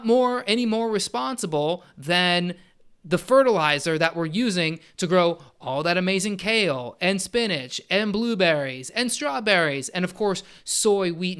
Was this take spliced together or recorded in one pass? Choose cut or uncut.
uncut